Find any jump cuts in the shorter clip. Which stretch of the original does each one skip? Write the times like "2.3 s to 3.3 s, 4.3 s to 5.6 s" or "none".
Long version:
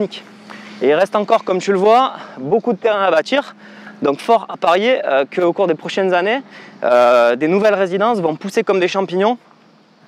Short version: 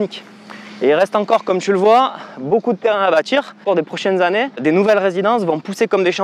3.6 s to 5.6 s, 6.5 s to 7.4 s